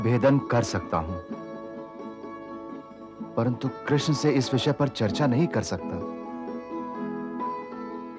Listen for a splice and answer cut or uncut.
uncut